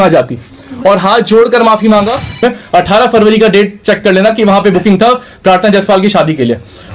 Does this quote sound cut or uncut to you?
cut